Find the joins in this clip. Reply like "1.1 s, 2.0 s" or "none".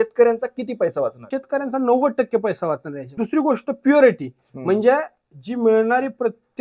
1.2 s, 3.1 s